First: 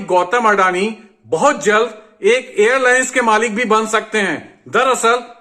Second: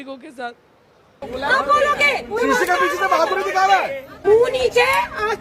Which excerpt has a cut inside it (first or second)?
second